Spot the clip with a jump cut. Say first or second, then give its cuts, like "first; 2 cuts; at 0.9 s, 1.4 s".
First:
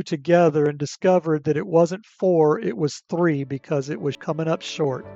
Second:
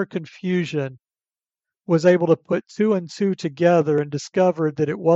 first; 1 cut; at 4.2 s